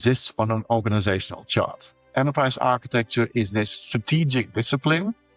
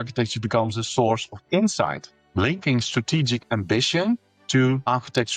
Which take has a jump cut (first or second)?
first